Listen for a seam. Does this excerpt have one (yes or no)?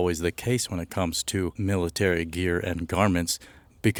no